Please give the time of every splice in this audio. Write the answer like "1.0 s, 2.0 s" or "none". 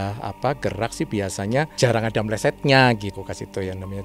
3.2 s